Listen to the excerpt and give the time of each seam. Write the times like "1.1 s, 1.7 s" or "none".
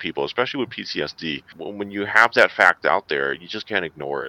none